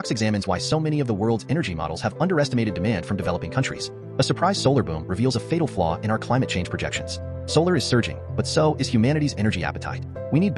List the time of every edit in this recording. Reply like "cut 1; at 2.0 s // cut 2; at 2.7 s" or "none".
none